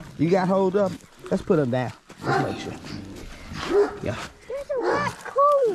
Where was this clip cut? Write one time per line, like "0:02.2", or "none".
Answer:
none